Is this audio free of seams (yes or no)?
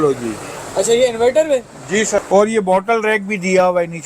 no